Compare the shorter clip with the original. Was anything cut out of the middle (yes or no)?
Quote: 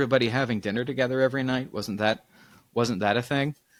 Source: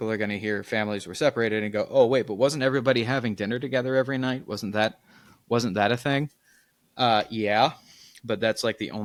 no